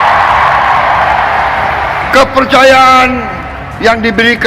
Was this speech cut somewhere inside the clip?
no; 0 cuts

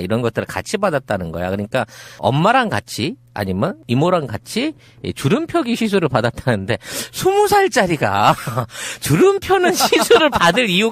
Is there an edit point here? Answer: no; 0 cuts

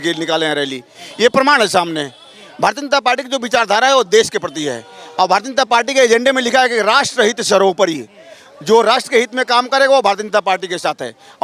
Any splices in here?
no; 0 cuts

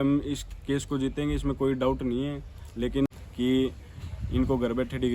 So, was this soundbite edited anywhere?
yes; 1 cut; at 3.1 s

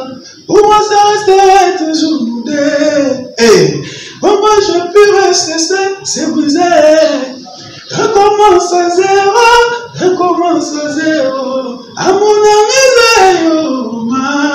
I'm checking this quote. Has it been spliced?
no; 0 cuts

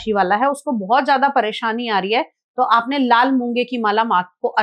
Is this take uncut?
yes; 0 cuts

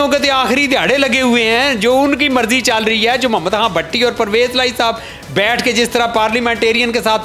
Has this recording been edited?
no; 0 cuts

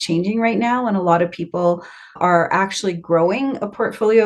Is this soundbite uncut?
no; 1 cut; at 2.1 s

